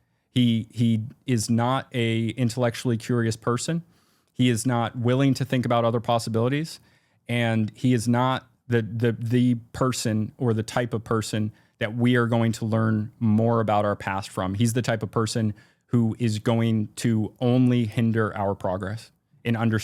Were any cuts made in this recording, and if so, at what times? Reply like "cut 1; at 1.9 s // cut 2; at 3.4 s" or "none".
none